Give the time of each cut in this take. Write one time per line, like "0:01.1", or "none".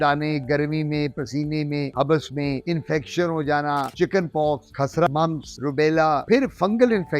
0:03.9
0:05.0
0:06.2